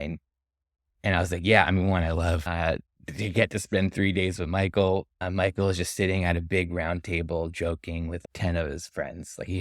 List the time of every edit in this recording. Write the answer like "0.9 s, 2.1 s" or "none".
2.5 s, 5.2 s